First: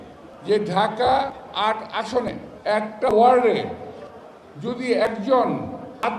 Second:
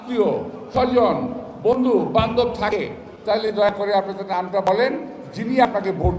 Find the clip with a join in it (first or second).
first